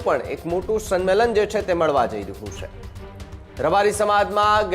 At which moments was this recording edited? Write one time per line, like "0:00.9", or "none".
none